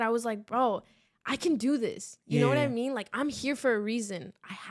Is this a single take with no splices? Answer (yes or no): yes